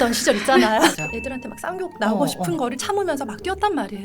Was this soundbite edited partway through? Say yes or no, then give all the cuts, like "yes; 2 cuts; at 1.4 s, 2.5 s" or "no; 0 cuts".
yes; 1 cut; at 0.9 s